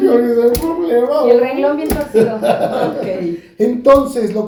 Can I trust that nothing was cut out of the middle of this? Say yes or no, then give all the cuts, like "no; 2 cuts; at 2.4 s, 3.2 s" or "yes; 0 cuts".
yes; 0 cuts